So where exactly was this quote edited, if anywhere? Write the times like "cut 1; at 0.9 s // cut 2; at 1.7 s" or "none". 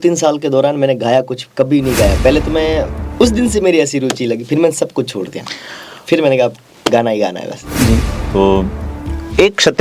cut 1; at 3.0 s // cut 2; at 8.1 s